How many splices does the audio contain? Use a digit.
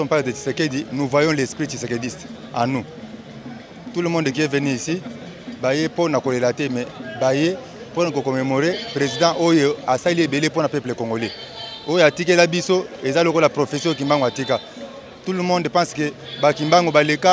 0